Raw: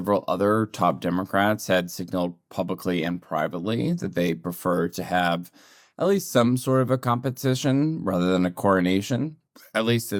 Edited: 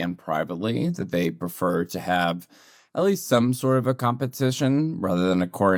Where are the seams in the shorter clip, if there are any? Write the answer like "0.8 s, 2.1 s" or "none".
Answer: none